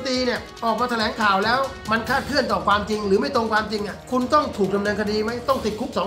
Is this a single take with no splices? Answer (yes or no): no